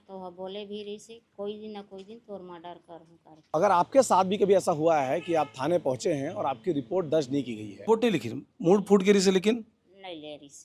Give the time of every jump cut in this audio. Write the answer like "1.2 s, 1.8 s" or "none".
3.4 s, 7.8 s